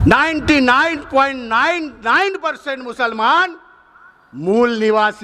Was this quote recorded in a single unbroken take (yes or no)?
yes